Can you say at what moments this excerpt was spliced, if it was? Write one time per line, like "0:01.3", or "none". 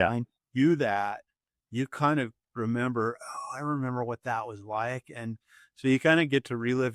none